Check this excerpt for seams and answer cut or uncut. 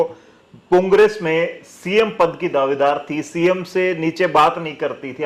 uncut